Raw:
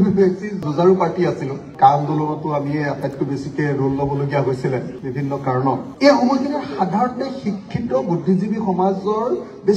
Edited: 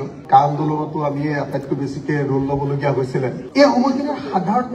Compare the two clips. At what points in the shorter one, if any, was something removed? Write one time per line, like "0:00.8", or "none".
0:03.4